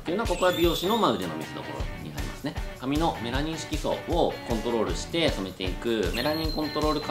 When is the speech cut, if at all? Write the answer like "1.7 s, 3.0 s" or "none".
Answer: 2.8 s